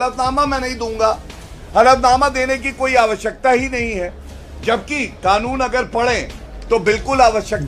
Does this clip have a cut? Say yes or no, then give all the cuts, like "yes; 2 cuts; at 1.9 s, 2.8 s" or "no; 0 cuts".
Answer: no; 0 cuts